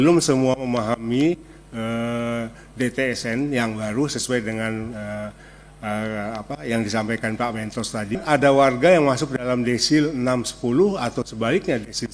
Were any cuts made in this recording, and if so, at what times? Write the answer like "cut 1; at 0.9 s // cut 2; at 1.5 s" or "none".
cut 1; at 8.1 s